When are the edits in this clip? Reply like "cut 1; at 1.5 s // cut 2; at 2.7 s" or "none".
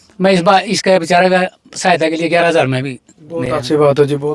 none